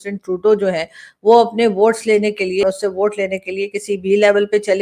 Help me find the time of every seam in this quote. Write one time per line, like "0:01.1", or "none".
0:02.6